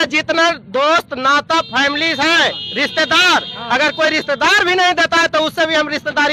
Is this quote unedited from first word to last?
yes; 0 cuts

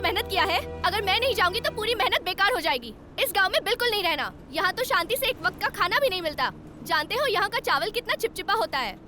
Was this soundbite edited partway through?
no; 0 cuts

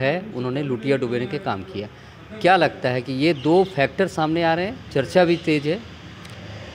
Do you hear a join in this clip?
no; 0 cuts

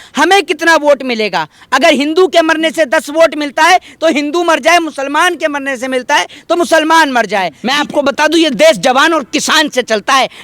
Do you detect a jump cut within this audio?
yes; 1 cut; at 7.6 s

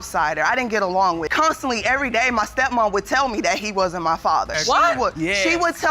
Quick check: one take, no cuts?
yes; 0 cuts

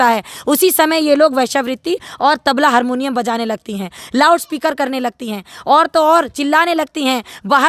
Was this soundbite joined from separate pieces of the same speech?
no; 0 cuts

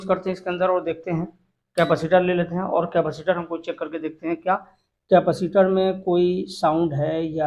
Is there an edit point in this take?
no; 0 cuts

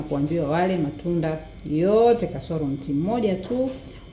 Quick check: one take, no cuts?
yes; 0 cuts

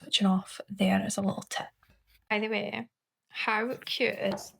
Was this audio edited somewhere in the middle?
yes; 1 cut; at 2.3 s

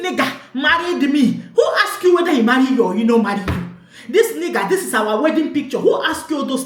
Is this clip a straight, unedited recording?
yes; 0 cuts

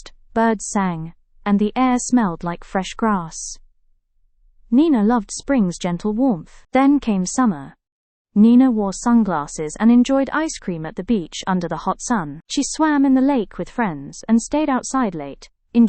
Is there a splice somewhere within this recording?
no; 0 cuts

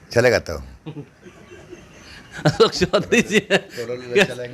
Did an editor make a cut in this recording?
no; 0 cuts

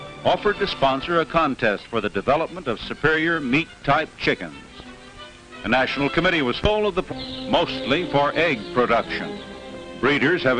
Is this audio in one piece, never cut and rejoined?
yes; 0 cuts

